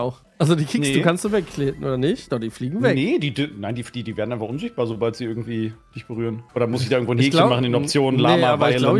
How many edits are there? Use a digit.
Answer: 1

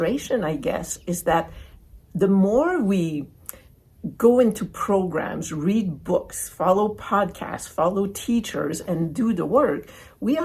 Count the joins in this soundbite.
0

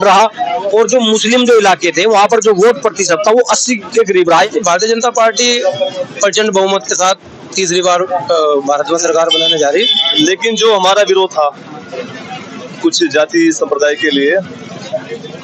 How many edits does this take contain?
2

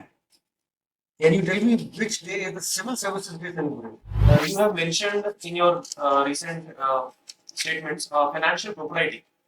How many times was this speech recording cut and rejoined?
1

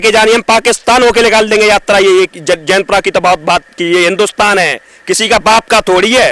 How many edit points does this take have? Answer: 0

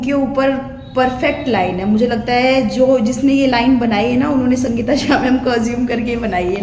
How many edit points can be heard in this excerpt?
0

